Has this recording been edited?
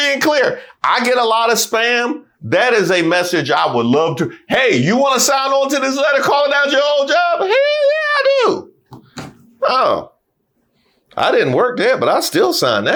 no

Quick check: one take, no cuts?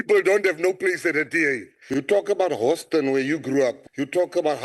no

